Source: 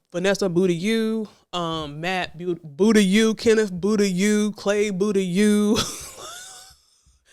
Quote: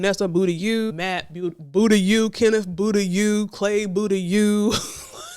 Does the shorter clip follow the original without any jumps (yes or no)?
no